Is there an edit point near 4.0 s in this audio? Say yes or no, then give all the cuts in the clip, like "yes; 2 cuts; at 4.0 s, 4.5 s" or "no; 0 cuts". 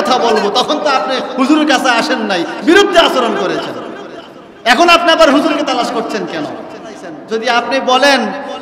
no; 1 cut; at 7.1 s